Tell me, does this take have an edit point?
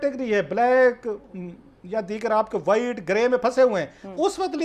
no; 0 cuts

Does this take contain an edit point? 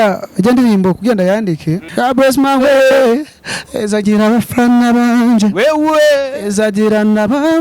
yes; 1 cut; at 1.9 s

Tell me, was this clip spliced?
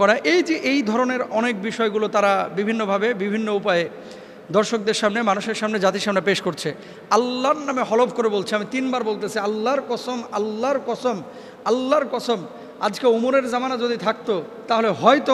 no; 0 cuts

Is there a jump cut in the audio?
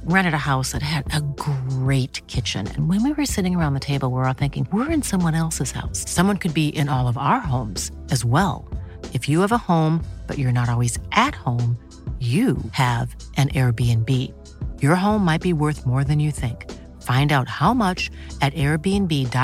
no; 0 cuts

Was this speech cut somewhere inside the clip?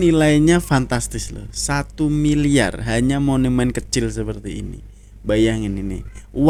no; 0 cuts

